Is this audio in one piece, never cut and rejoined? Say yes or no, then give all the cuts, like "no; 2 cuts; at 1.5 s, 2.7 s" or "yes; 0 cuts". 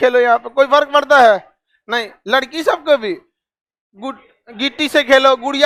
yes; 0 cuts